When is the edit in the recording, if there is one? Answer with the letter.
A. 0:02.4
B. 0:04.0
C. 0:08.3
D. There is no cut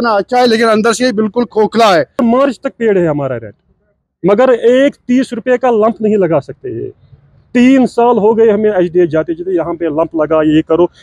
A